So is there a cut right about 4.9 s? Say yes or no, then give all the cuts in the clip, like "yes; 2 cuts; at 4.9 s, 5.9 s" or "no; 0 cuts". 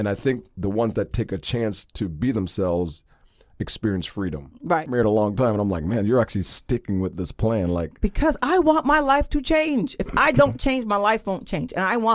yes; 1 cut; at 4.9 s